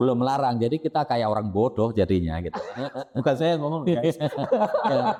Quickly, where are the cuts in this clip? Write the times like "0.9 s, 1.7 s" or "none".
none